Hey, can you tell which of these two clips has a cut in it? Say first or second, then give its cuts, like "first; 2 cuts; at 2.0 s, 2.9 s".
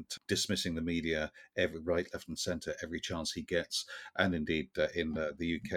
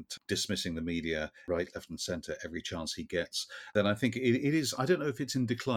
second; 2 cuts; at 1.4 s, 3.5 s